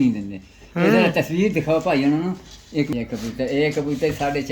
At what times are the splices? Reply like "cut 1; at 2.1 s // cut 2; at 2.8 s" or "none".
cut 1; at 2.9 s